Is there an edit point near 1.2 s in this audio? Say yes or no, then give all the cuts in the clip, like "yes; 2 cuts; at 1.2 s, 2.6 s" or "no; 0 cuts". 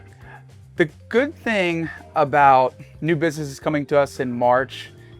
no; 1 cut; at 2.9 s